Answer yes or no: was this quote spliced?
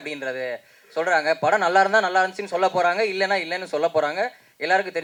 no